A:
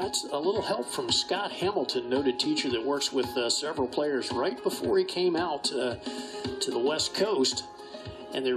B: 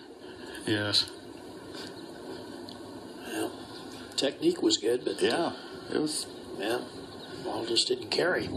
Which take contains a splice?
B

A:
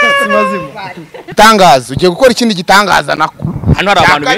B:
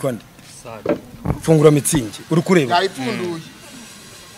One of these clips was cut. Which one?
A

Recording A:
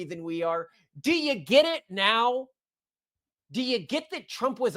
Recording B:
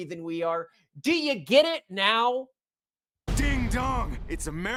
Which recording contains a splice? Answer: A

